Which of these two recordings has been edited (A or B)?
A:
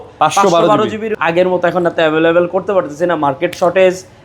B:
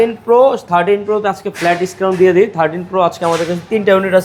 A